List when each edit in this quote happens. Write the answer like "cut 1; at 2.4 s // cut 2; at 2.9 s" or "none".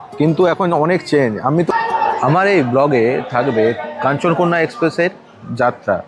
cut 1; at 1.7 s